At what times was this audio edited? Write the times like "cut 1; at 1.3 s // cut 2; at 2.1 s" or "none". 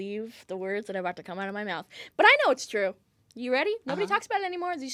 none

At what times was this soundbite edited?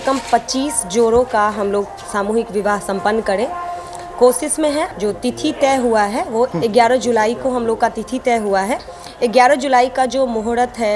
cut 1; at 4.9 s // cut 2; at 6.5 s

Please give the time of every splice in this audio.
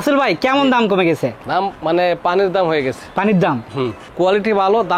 cut 1; at 4.0 s

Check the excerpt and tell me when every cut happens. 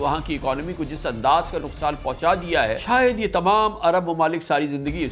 cut 1; at 2.8 s

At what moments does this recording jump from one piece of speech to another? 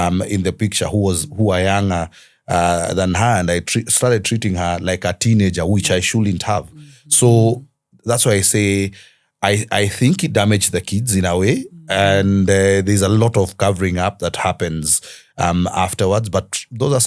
none

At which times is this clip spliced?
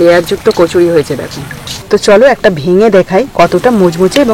cut 1; at 1.7 s

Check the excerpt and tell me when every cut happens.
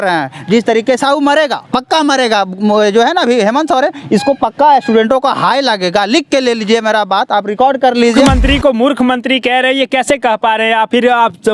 cut 1; at 8.2 s

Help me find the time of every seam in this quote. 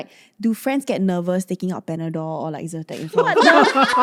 none

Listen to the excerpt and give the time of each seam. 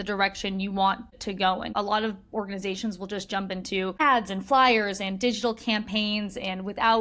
cut 1; at 1.3 s // cut 2; at 4.0 s

